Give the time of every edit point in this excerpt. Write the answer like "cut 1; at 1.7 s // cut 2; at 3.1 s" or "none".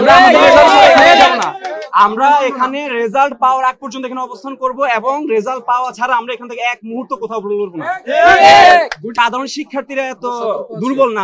cut 1; at 9.1 s